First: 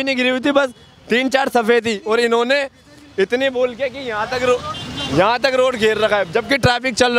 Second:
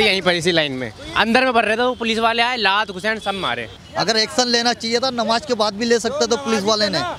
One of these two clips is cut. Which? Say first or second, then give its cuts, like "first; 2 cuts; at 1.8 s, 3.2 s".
second; 1 cut; at 3.8 s